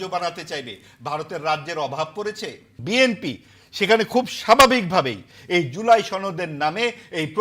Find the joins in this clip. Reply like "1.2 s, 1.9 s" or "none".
2.8 s